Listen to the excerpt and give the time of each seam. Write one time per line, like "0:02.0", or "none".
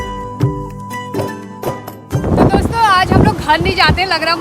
0:02.2

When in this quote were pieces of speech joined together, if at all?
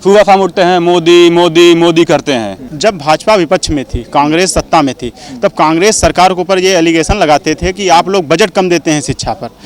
0:02.6

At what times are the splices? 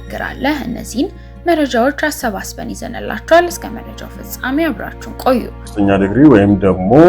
0:05.7

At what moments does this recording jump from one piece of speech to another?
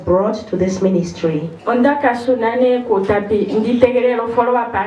0:01.5

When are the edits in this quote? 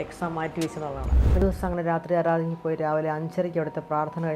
0:01.4

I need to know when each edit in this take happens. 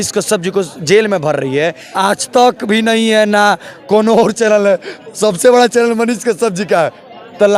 0:01.8

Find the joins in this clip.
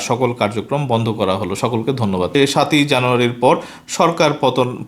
0:02.3

